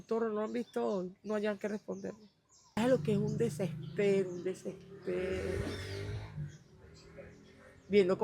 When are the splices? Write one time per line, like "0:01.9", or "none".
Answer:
0:02.8